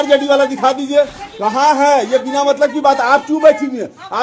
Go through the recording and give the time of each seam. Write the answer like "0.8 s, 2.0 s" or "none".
1.2 s